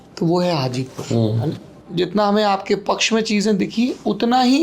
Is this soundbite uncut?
no; 1 cut; at 1.7 s

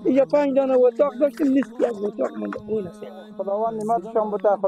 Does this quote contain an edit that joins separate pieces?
yes; 1 cut; at 3.3 s

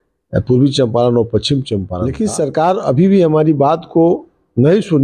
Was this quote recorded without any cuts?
no; 1 cut; at 2.0 s

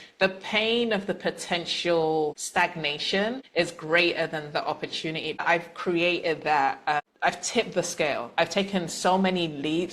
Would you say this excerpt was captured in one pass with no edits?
no; 4 cuts; at 2.4 s, 3.4 s, 5.4 s, 7.1 s

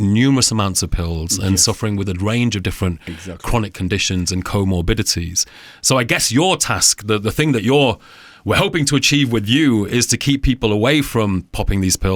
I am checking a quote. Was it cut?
no; 0 cuts

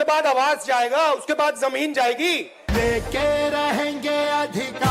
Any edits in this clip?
yes; 1 cut; at 2.5 s

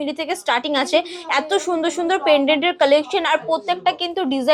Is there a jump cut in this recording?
no; 0 cuts

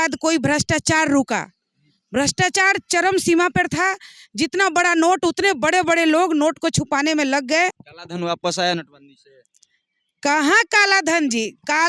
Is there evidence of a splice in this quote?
yes; 1 cut; at 7.9 s

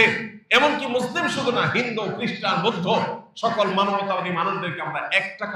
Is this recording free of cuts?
yes; 0 cuts

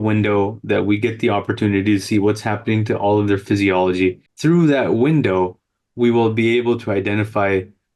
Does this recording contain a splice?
yes; 1 cut; at 4.3 s

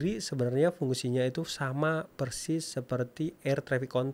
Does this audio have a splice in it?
no; 0 cuts

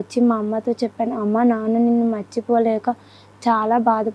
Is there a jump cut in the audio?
no; 0 cuts

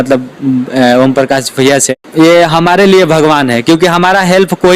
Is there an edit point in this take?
yes; 1 cut; at 2.0 s

